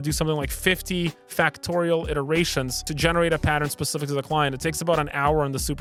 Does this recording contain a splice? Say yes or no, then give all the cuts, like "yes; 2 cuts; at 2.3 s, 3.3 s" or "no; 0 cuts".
no; 0 cuts